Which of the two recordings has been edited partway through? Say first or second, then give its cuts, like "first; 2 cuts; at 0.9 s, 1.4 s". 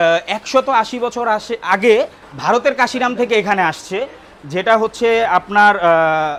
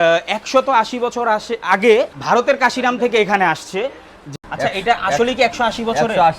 second; 2 cuts; at 2.2 s, 4.2 s